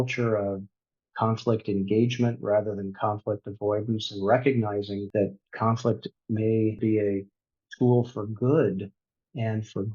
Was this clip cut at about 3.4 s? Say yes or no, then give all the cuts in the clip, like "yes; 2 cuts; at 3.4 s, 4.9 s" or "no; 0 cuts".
no; 2 cuts; at 5.0 s, 6.8 s